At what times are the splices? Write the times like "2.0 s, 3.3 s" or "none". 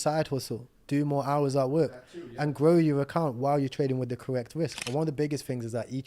4.8 s